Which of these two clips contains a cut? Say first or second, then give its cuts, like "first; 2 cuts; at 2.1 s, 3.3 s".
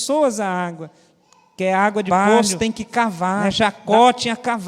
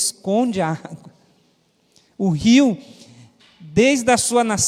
first; 1 cut; at 3.4 s